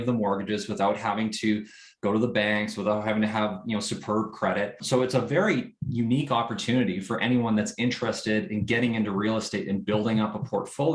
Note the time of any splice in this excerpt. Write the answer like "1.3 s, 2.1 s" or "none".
4.8 s

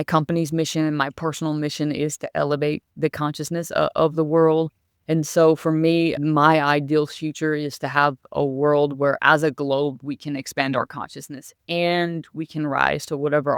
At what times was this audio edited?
6.2 s, 8.3 s

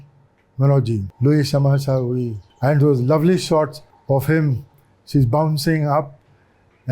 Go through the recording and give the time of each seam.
1.1 s, 2.4 s, 3.9 s

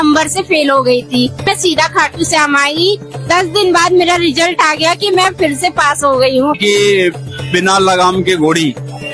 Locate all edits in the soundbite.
1.5 s, 3.1 s, 6.6 s

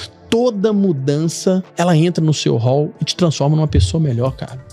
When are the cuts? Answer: none

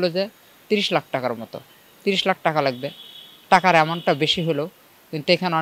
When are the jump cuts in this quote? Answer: none

